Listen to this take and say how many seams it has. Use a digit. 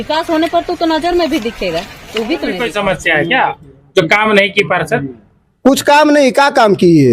1